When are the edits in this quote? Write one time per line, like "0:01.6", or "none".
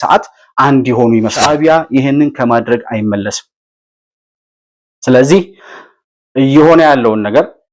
0:01.4

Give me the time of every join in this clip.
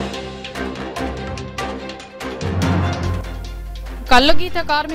0:00.9

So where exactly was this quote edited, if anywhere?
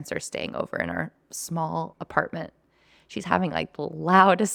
none

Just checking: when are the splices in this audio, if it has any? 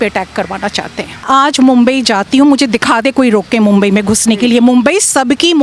0:01.2

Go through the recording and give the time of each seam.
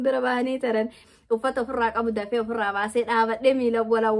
0:01.1

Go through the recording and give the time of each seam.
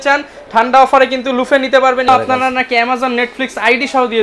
0:02.1

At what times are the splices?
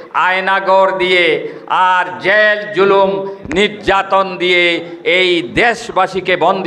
none

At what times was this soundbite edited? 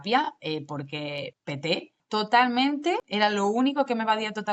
0:01.9
0:03.1

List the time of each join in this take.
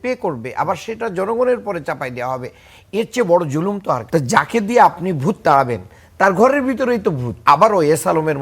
0:04.0
0:07.4

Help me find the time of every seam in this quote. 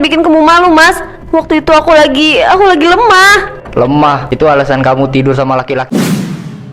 0:05.8

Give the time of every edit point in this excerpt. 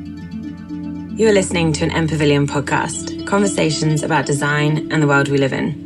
0:01.2

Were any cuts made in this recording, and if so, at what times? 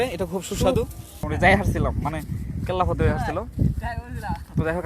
0:01.2

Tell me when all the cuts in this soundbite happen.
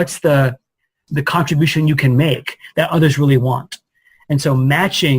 0:01.0

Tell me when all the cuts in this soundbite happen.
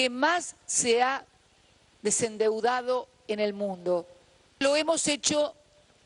0:04.6

